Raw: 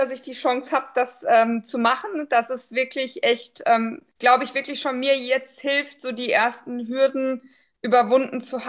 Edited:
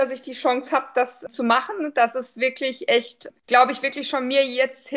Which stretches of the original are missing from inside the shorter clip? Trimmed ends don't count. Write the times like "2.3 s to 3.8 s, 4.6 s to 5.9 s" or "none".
1.2 s to 1.6 s, 3.6 s to 3.9 s